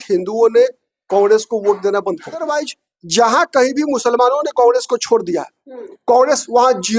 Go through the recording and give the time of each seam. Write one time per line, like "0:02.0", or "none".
0:02.5